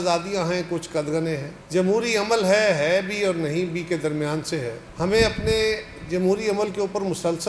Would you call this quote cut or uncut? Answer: uncut